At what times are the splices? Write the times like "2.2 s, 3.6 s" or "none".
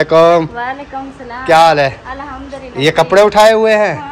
none